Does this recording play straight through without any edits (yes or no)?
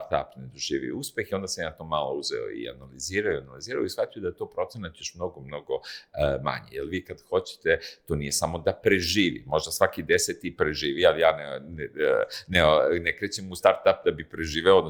yes